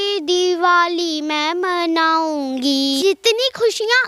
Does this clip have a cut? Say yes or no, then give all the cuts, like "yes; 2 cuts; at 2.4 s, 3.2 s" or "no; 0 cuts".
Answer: yes; 1 cut; at 3.0 s